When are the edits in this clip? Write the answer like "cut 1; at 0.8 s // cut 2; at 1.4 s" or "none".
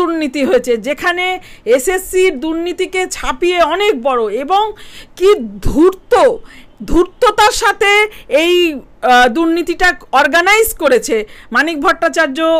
none